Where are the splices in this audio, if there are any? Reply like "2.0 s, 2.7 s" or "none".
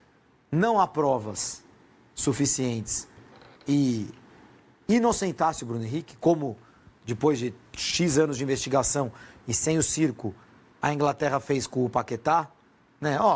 none

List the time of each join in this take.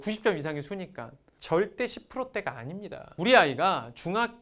1.3 s, 3.0 s

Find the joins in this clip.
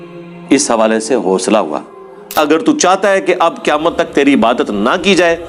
2.4 s

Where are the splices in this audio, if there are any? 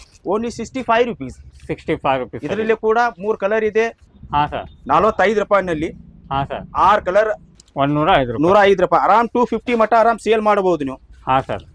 4.1 s, 7.6 s

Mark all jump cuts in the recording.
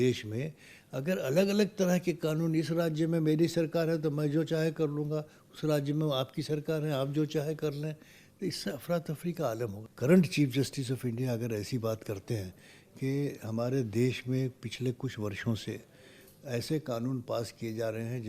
9.8 s

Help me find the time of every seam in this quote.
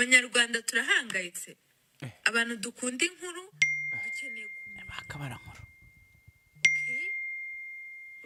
none

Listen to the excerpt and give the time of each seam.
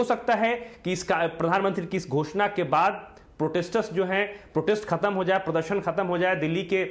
3.7 s

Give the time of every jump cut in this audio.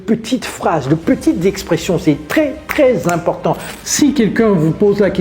3.7 s

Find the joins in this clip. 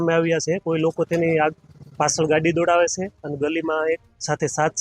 none

